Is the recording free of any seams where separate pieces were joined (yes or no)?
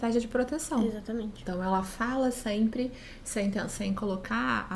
no